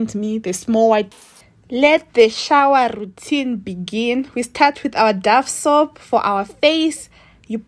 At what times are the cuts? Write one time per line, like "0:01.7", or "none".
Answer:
0:01.1